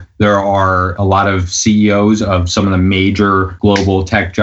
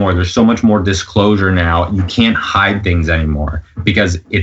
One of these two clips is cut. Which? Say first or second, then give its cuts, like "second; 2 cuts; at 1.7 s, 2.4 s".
first; 2 cuts; at 0.9 s, 3.5 s